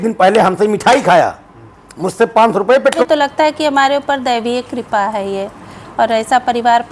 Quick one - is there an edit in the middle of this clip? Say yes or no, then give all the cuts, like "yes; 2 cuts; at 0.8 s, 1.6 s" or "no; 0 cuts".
yes; 1 cut; at 3.0 s